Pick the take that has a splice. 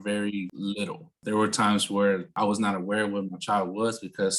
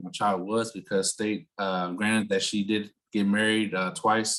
first; 2 cuts; at 1.0 s, 2.4 s

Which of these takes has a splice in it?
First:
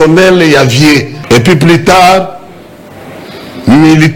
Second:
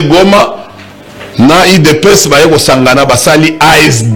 first; 1 cut; at 1.1 s

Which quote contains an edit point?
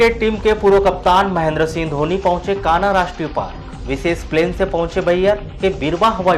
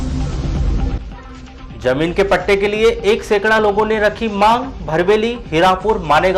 second; 1 cut; at 0.9 s

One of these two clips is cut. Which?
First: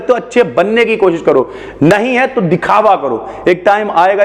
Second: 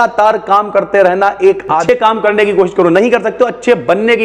second; 1 cut; at 1.7 s

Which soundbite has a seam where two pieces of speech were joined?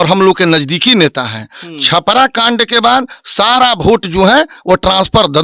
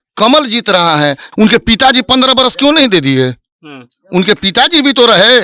second; 1 cut; at 1.2 s

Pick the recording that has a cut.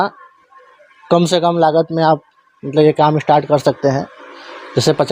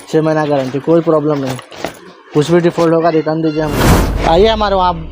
second; 1 cut; at 4.1 s

